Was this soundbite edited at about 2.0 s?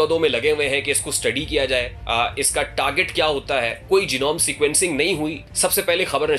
yes; 3 cuts; at 2.0 s, 3.8 s, 5.4 s

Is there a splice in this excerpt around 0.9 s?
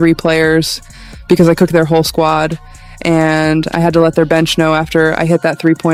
no; 0 cuts

